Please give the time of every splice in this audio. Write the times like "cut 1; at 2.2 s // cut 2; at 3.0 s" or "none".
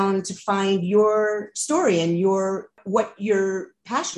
cut 1; at 2.8 s